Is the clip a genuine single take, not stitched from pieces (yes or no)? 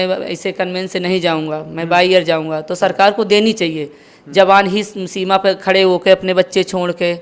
yes